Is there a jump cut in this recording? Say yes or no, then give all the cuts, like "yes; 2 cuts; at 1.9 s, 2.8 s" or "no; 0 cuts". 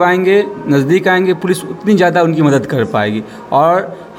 no; 0 cuts